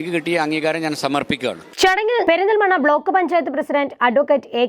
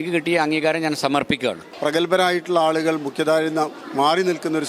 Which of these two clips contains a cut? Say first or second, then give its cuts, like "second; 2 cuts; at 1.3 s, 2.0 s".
second; 1 cut; at 1.7 s